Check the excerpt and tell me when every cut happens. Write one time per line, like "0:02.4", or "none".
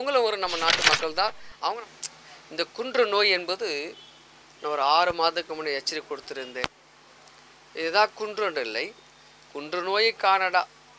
0:01.8